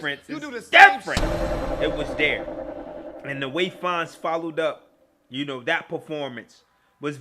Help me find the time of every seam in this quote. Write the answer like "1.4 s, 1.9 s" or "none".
1.2 s